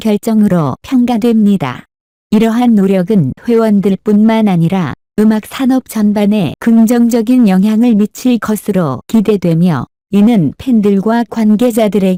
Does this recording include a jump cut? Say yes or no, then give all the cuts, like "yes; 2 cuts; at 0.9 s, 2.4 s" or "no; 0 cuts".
no; 0 cuts